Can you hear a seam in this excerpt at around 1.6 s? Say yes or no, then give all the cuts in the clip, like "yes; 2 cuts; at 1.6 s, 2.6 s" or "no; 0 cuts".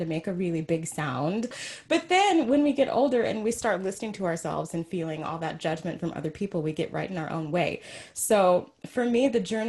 yes; 1 cut; at 1.6 s